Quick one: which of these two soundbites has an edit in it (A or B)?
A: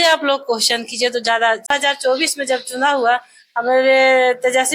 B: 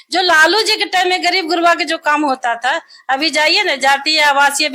A